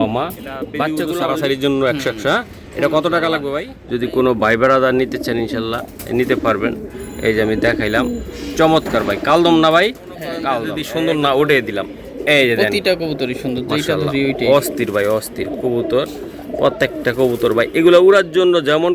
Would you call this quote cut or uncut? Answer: cut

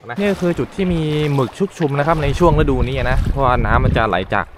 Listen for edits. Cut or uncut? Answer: uncut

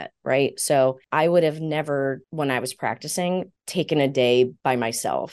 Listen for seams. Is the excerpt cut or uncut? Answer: cut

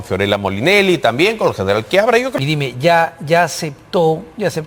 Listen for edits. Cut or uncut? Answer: cut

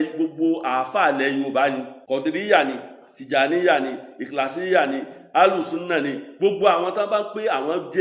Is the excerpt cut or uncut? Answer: cut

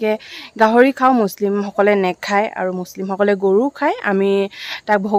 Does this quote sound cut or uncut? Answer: uncut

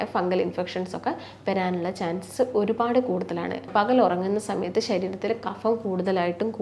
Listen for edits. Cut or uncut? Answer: cut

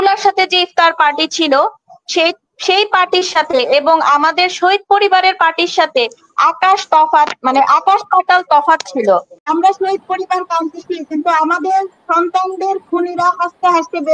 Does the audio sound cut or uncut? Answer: cut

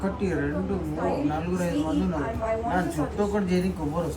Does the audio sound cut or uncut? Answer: uncut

